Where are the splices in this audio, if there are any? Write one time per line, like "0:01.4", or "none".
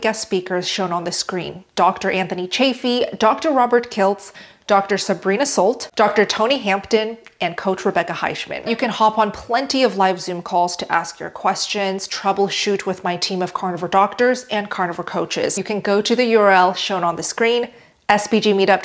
0:15.6